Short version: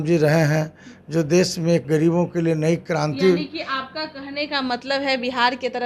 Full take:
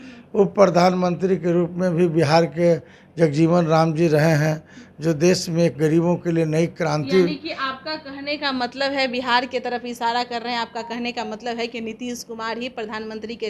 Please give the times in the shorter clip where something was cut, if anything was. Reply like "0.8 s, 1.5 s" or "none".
none

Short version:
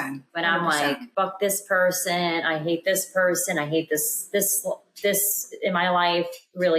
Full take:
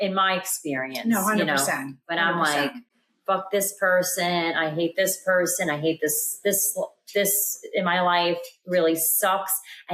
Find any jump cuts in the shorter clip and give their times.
1.1 s

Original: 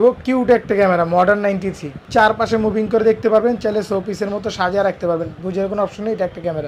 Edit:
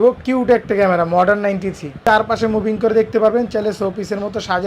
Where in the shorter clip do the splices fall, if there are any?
1.8 s

